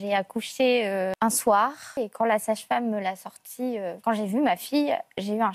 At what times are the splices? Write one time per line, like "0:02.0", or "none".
0:01.1
0:02.0
0:04.0